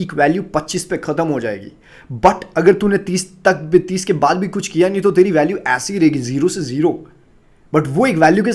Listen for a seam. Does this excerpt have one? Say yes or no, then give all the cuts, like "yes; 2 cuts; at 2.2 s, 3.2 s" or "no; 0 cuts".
no; 0 cuts